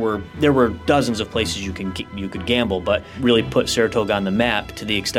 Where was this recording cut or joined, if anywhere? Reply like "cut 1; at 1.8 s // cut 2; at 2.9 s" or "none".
cut 1; at 3.1 s